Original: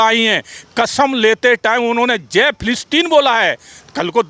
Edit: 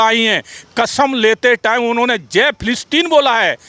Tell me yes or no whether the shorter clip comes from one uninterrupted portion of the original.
yes